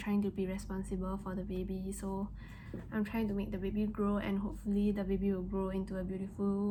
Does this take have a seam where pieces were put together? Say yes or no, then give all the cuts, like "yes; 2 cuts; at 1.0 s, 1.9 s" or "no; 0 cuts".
no; 0 cuts